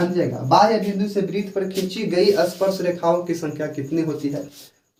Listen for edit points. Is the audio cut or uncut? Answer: uncut